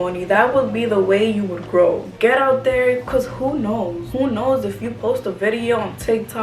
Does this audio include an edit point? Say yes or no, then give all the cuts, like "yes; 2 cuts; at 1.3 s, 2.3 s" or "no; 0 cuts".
yes; 2 cuts; at 2.1 s, 4.0 s